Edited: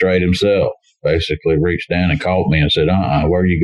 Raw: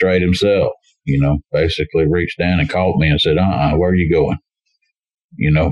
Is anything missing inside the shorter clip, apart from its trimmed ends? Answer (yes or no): yes